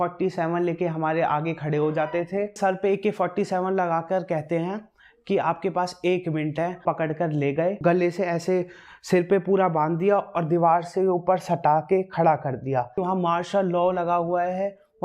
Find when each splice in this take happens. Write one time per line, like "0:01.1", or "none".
0:02.5
0:06.8
0:07.8
0:12.9

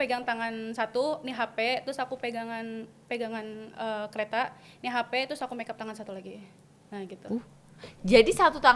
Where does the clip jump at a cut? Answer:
none

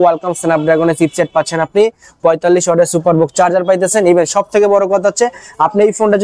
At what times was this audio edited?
none

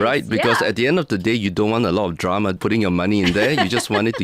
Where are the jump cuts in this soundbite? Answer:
0:02.6

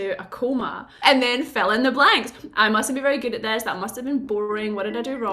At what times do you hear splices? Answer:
0:01.0

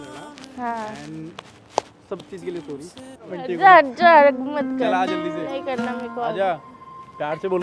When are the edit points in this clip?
0:03.4

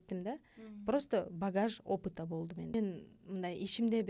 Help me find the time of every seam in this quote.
0:02.7

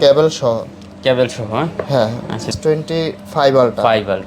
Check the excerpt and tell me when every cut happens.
0:02.5

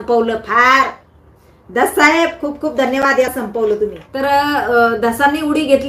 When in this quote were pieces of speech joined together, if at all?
0:04.1

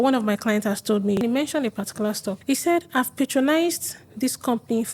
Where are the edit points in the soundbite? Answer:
0:01.2
0:02.3

